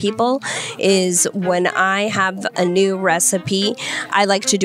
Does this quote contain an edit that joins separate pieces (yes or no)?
no